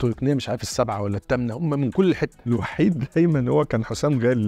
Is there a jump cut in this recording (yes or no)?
yes